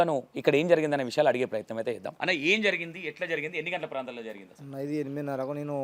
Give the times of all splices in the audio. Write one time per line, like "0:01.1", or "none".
0:02.1